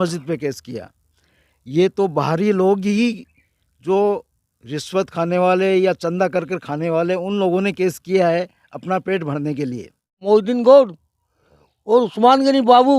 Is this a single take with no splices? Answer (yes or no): no